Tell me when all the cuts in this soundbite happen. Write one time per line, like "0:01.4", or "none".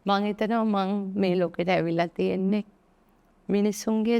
none